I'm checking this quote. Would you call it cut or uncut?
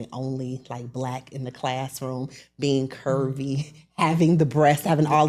uncut